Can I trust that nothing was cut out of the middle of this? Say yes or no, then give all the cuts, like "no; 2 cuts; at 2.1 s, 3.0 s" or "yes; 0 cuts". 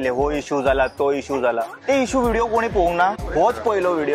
no; 2 cuts; at 1.7 s, 3.2 s